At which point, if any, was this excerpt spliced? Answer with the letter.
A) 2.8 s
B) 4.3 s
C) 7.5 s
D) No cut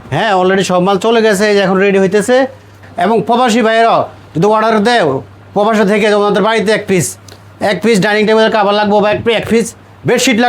A